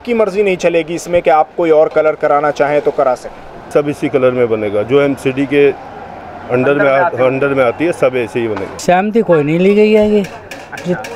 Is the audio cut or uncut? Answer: cut